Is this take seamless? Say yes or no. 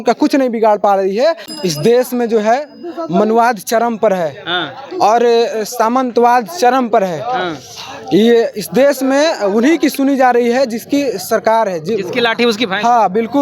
no